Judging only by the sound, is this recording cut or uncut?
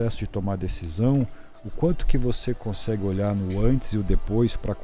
uncut